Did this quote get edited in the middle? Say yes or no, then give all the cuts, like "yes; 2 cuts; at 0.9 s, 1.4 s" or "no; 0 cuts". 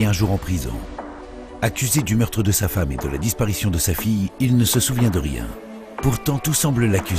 no; 0 cuts